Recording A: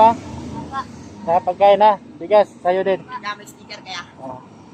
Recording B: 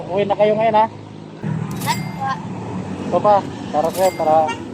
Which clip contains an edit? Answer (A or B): B